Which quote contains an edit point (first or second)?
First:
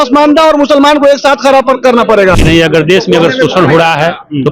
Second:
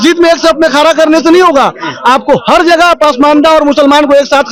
first